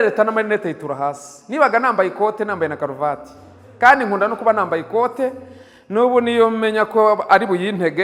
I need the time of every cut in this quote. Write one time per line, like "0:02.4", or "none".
none